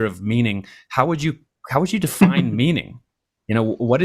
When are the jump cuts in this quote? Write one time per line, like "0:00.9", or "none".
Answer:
none